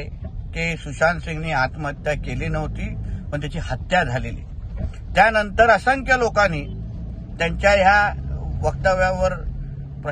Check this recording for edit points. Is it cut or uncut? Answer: uncut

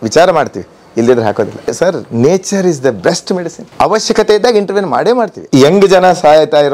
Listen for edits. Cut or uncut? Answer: cut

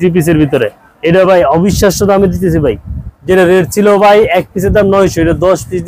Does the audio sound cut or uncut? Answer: uncut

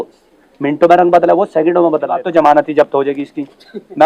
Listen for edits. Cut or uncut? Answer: cut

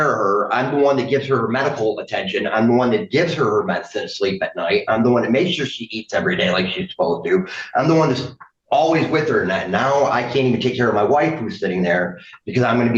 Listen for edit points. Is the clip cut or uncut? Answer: uncut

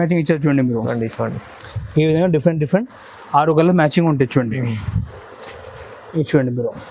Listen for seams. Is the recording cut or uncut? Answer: uncut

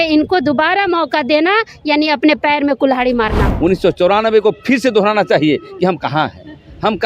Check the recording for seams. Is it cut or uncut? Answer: cut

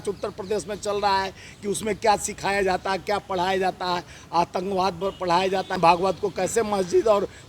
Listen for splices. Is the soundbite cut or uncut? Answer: cut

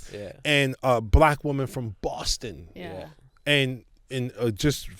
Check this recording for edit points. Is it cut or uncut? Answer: uncut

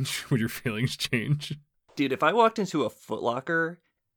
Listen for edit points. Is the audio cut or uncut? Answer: uncut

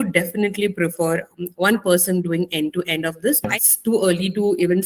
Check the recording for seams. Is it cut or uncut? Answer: cut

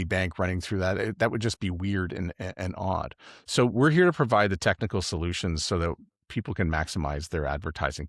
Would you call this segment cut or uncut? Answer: uncut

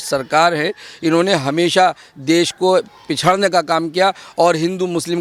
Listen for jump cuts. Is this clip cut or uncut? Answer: uncut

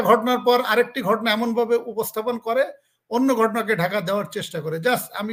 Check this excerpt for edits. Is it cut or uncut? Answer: uncut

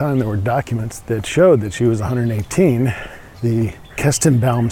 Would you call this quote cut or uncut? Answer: cut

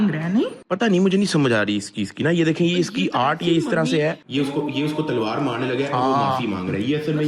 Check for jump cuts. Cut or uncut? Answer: uncut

